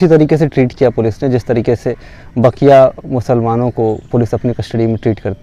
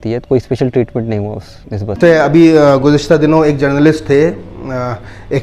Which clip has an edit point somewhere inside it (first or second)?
second